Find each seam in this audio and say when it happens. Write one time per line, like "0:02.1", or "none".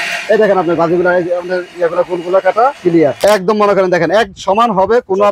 0:03.2